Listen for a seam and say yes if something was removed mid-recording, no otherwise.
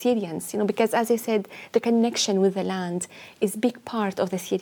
no